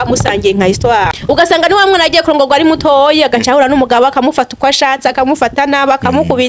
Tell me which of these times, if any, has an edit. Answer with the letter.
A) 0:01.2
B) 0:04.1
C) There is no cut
A